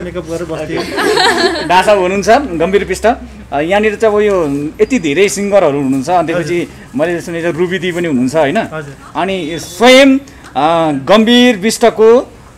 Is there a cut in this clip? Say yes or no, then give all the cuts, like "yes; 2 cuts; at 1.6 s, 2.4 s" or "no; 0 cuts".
no; 0 cuts